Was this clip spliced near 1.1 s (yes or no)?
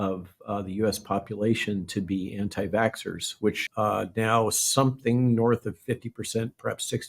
no